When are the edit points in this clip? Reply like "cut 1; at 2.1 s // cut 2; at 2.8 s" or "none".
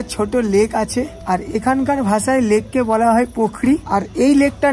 cut 1; at 1.2 s // cut 2; at 3.8 s